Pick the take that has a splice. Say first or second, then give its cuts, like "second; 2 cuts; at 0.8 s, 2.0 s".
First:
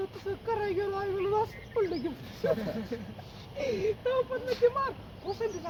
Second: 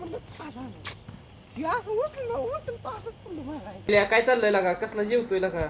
second; 1 cut; at 3.8 s